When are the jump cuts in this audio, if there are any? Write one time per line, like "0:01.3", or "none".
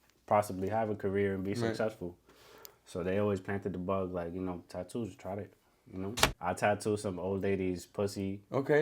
0:06.3

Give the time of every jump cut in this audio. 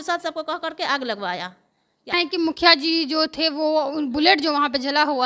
0:02.3

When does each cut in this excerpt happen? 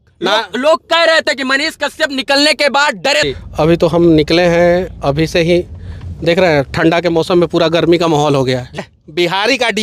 0:03.3
0:08.8

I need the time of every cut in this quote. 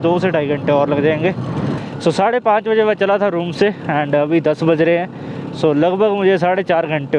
0:01.8

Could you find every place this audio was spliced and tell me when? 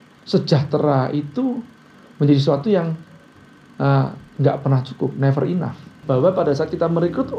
0:06.0

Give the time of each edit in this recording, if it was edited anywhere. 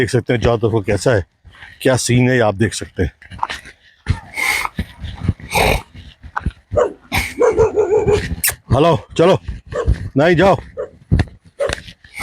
none

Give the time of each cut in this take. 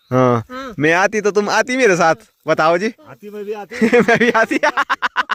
none

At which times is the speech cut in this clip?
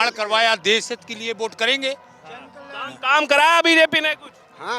none

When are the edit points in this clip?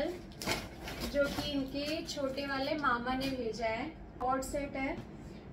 0:04.2

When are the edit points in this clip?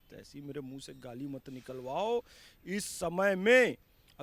none

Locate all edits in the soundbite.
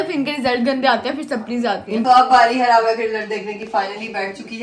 0:02.0

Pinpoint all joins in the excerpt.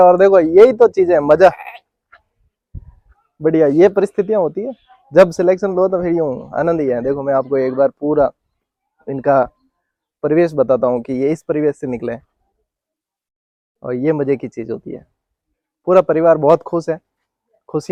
none

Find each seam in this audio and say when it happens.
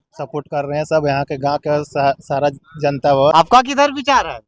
0:03.3

